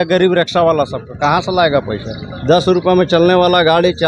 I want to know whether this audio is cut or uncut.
uncut